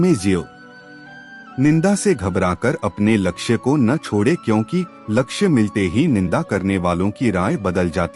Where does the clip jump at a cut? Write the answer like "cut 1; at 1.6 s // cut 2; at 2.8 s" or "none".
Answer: none